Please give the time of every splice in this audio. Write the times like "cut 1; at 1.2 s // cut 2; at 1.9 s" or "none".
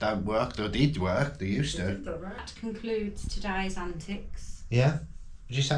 none